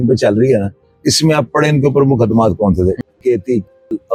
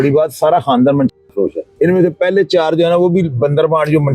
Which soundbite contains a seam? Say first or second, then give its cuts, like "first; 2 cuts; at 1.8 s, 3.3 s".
second; 1 cut; at 1.6 s